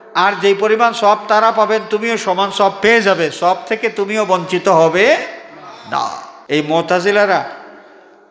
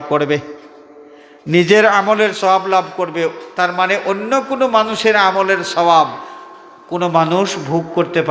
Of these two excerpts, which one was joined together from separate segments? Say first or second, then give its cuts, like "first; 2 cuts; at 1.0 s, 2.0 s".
first; 1 cut; at 6.3 s